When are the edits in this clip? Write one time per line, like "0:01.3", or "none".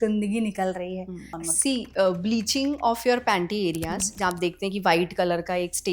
0:01.3